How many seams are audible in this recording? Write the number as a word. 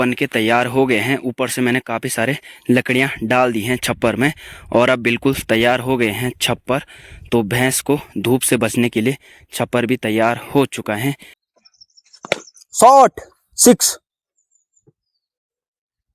one